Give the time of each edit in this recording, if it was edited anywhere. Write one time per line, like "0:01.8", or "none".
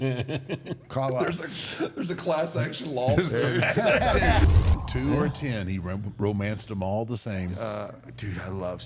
0:04.4